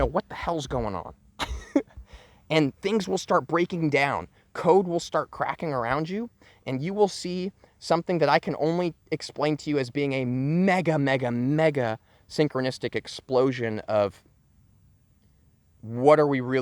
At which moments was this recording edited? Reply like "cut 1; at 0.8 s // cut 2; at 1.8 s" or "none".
none